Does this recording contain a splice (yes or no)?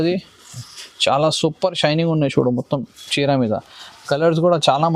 no